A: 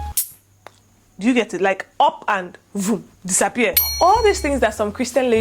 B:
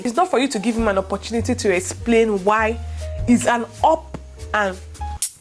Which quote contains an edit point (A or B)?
A